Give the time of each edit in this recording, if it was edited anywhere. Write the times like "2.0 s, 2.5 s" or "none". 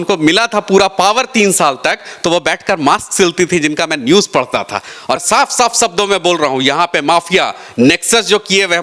5.2 s